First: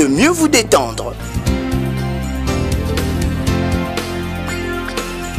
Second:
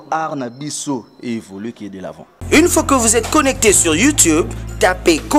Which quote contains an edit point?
second; 1 cut; at 2.4 s

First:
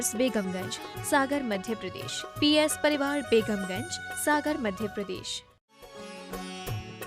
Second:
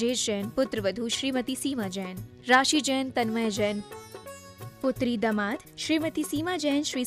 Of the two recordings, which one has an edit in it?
first; 1 cut; at 6.1 s

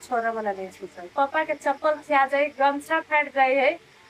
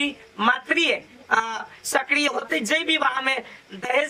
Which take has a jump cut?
first; 1 cut; at 1.0 s

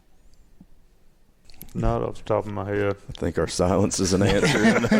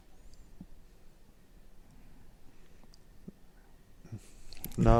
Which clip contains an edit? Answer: first; 1 cut; at 1.4 s

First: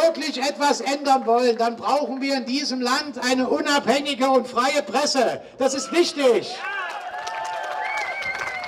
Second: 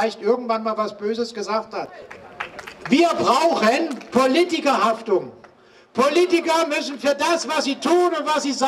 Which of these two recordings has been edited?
second; 1 cut; at 2.1 s

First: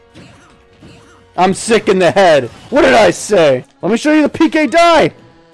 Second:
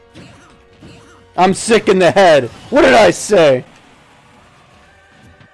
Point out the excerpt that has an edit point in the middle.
first; 1 cut; at 3.7 s

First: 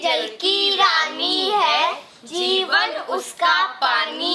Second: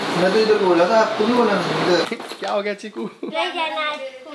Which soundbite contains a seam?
second; 1 cut; at 2.1 s

